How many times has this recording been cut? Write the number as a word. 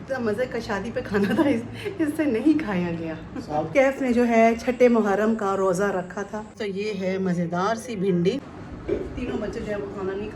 two